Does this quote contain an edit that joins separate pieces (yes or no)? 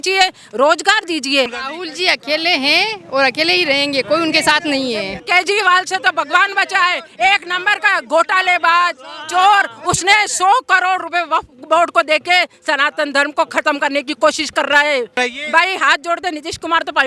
yes